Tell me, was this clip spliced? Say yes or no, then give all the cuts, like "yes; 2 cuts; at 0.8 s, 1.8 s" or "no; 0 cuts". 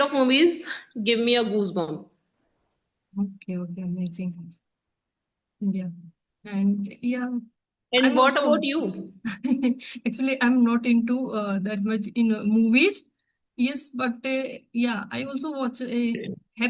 no; 0 cuts